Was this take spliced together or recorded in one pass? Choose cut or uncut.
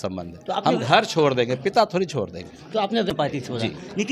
cut